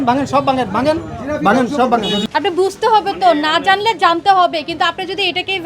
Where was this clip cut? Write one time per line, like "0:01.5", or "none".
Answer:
0:02.3

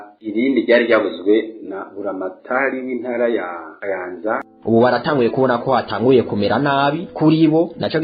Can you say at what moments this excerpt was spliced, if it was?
0:04.5

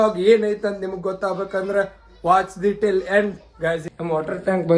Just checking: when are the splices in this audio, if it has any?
0:03.9

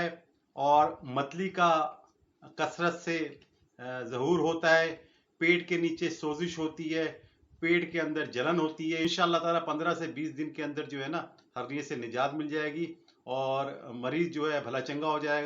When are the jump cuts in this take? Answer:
0:09.0

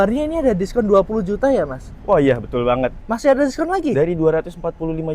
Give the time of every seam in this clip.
0:03.0

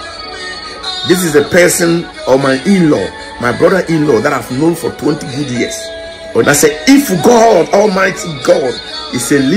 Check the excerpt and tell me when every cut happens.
0:06.4

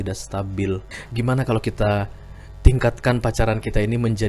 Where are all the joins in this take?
0:01.0

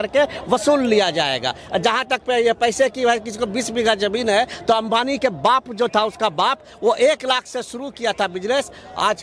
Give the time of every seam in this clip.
none

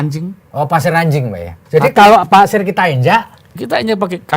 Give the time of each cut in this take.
0:01.5

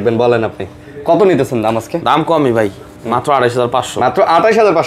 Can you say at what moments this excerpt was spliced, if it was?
none

